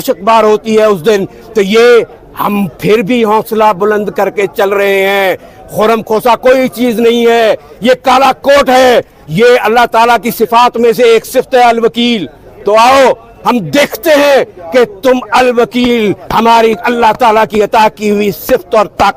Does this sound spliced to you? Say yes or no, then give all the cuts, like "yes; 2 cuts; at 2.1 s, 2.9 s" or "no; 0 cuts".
no; 0 cuts